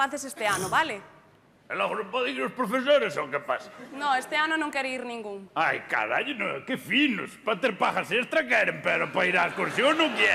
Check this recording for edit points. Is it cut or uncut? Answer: uncut